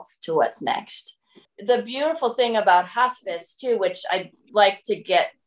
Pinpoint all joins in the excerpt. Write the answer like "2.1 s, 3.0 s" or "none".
1.5 s